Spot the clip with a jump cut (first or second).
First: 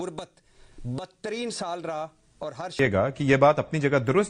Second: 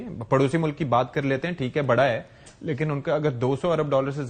first